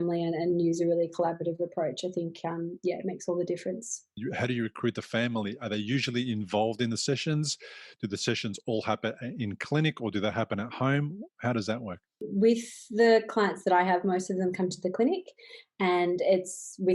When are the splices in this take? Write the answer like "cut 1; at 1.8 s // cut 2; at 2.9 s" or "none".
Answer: cut 1; at 4.2 s // cut 2; at 12.3 s